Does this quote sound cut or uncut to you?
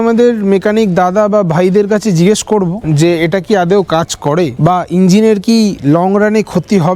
uncut